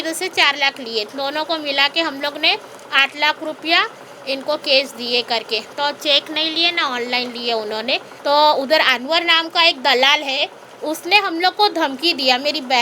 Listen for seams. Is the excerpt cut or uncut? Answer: cut